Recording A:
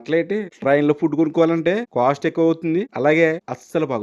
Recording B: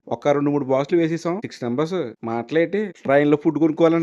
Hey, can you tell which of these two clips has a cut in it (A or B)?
B